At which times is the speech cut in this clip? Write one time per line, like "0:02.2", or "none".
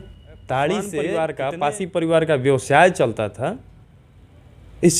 0:01.0